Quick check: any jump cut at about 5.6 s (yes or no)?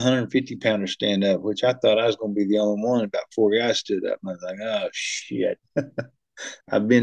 yes